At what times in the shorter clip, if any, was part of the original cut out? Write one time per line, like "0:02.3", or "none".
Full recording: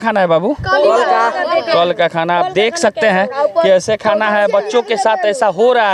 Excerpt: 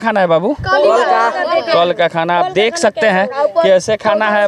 none